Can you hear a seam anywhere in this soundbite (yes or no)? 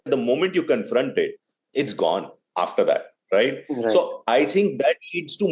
no